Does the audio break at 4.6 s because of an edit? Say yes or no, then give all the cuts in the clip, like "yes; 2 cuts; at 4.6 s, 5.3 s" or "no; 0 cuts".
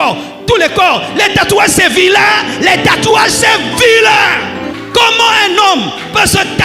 yes; 1 cut; at 4.6 s